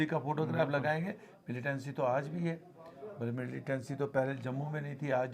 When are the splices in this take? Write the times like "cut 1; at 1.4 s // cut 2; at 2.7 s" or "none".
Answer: cut 1; at 1.3 s